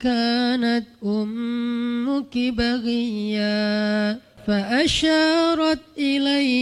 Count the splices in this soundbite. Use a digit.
1